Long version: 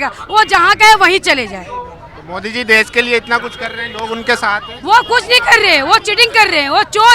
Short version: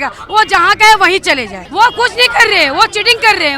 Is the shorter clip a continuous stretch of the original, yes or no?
no